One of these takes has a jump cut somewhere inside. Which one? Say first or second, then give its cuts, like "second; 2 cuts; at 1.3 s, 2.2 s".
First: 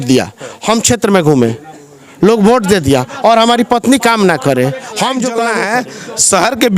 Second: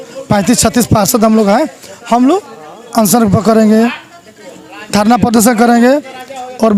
first; 1 cut; at 5.4 s